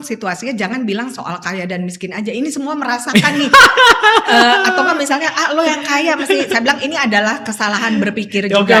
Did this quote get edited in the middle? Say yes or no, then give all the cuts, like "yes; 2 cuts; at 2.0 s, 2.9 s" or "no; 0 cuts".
no; 0 cuts